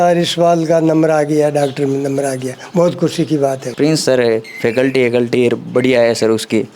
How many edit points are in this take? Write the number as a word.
one